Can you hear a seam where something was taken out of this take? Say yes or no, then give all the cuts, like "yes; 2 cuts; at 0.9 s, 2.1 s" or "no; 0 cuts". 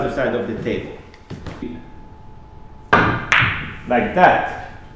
yes; 1 cut; at 1.6 s